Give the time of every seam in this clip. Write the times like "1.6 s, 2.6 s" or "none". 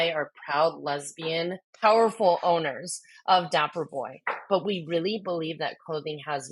1.7 s

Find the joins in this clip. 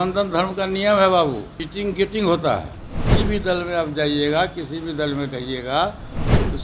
1.6 s

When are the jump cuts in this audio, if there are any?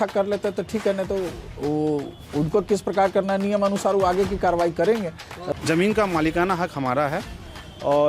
5.4 s

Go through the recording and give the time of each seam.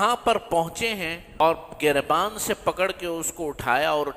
1.4 s

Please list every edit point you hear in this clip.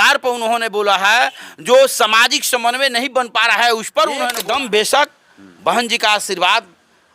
4.4 s

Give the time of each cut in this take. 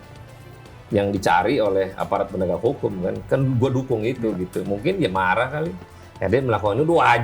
none

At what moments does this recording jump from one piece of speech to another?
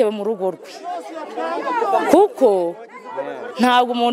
none

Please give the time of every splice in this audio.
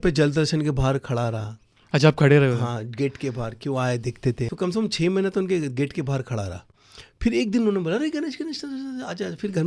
4.5 s

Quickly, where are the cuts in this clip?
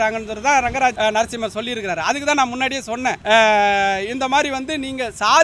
0.9 s, 3.2 s

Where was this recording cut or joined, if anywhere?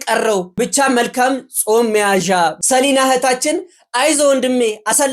2.6 s

